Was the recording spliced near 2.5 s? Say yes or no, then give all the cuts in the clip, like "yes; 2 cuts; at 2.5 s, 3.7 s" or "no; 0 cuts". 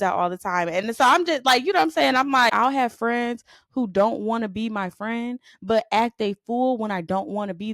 yes; 1 cut; at 2.5 s